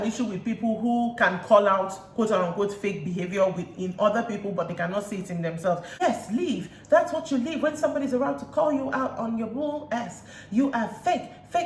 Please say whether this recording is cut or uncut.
cut